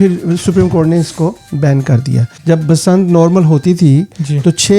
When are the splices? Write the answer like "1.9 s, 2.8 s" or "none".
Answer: 2.3 s